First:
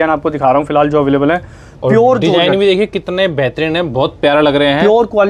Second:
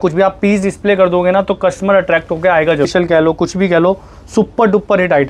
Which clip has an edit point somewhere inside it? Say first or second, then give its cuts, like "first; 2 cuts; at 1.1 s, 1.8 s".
second; 1 cut; at 2.9 s